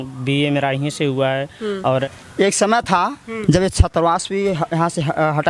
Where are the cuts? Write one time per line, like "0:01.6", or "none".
0:02.0